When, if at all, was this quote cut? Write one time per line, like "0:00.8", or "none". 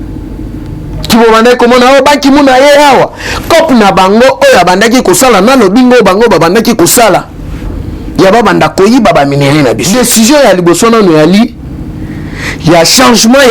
0:09.8